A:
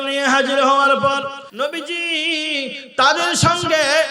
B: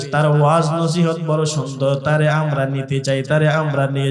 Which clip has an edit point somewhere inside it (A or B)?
A